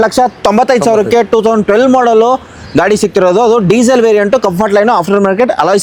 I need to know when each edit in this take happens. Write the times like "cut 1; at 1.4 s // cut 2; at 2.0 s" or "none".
none